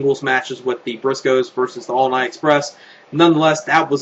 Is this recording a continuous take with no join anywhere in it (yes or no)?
yes